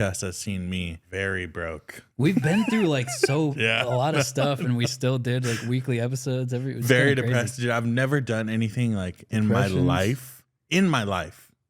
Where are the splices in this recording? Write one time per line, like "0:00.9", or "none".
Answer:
0:01.0